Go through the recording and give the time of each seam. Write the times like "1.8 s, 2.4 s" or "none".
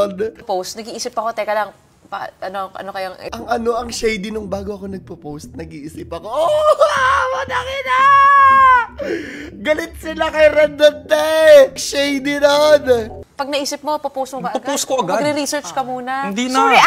11.8 s, 13.2 s